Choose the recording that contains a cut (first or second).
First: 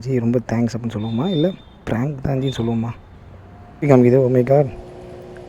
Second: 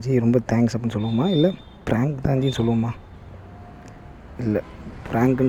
first